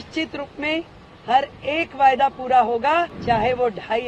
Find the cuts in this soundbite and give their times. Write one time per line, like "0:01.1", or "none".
0:03.2